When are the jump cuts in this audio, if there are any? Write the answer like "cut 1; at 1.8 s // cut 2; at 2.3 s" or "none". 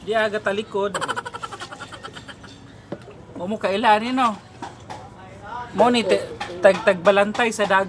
none